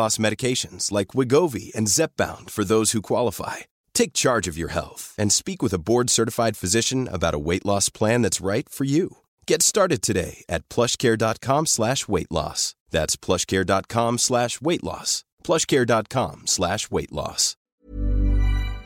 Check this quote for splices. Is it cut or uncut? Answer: cut